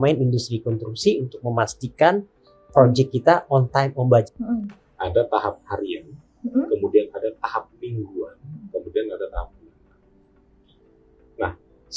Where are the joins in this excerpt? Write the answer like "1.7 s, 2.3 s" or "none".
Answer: 4.3 s